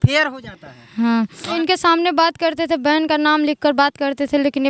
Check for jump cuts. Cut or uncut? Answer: cut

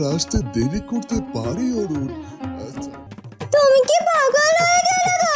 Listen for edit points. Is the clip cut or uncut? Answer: cut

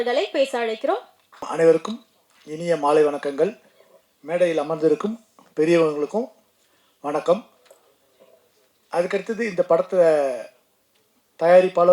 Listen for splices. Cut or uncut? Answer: cut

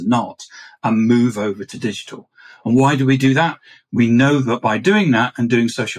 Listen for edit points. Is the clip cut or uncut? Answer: cut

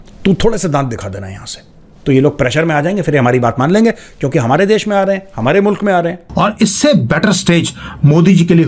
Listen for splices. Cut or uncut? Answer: cut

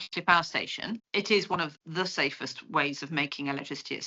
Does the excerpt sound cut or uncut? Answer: cut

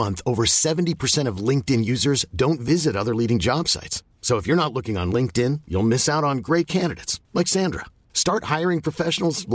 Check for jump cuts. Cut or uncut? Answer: uncut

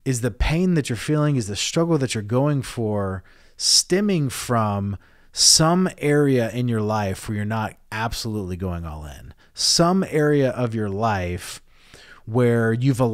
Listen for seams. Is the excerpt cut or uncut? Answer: uncut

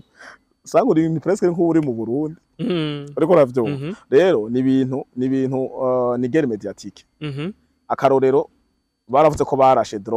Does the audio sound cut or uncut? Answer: uncut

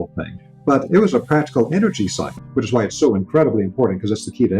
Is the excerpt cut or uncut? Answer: cut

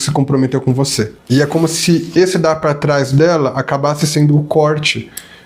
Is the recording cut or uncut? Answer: cut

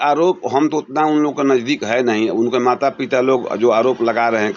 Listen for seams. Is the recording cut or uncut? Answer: uncut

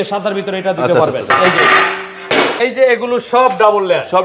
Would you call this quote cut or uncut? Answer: cut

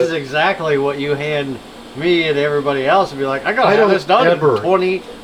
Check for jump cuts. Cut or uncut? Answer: uncut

